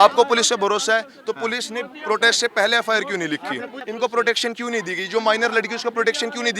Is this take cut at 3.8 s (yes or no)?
yes